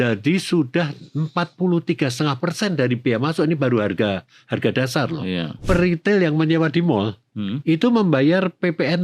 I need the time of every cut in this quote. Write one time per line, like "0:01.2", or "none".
0:05.6